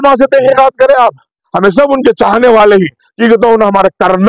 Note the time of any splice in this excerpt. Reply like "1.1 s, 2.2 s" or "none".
1.5 s